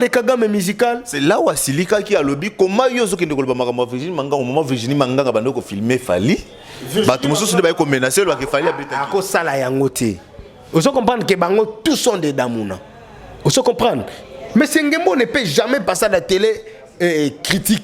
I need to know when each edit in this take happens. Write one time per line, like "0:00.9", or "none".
none